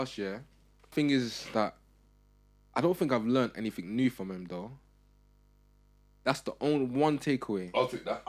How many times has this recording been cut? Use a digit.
1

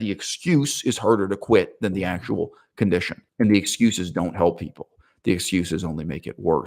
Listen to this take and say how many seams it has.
1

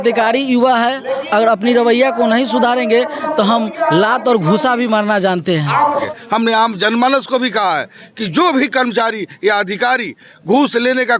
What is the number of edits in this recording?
1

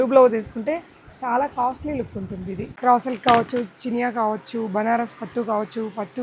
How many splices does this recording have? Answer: 1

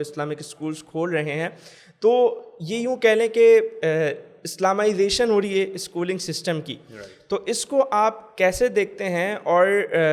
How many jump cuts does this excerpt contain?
0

